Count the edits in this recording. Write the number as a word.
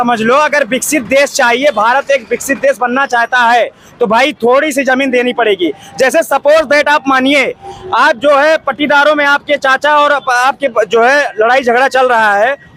zero